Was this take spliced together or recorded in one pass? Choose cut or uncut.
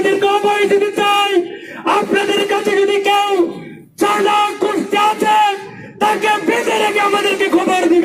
uncut